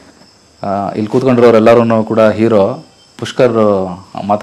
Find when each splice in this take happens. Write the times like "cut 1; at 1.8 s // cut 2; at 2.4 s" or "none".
none